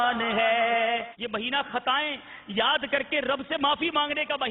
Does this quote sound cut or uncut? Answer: cut